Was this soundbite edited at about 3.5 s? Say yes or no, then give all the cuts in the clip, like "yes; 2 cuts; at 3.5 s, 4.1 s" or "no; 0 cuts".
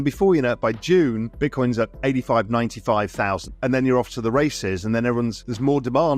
yes; 1 cut; at 3.5 s